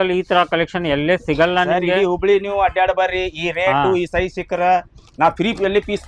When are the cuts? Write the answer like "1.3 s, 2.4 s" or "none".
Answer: none